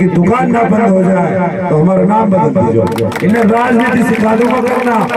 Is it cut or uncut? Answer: uncut